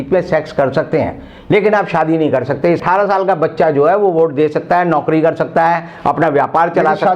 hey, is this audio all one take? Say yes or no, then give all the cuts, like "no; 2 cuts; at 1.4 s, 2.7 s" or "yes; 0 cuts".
no; 1 cut; at 2.8 s